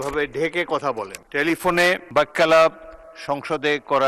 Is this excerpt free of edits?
no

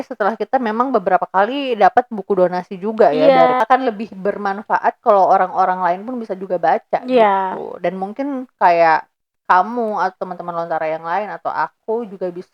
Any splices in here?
yes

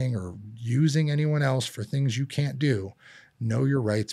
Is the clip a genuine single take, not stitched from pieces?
yes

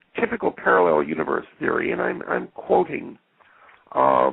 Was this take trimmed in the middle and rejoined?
no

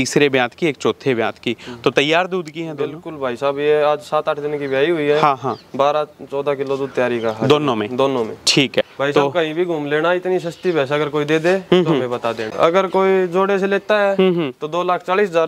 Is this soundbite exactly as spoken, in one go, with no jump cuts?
no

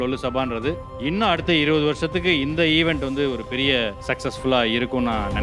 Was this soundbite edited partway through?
yes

